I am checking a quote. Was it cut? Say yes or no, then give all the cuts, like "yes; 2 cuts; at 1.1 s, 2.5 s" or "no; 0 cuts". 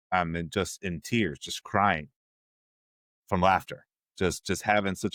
no; 0 cuts